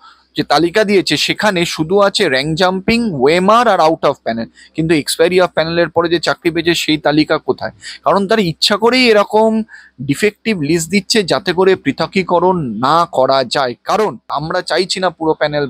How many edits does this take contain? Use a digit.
1